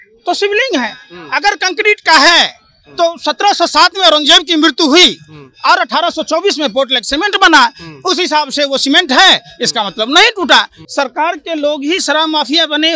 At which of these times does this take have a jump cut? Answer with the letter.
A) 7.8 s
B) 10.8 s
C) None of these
B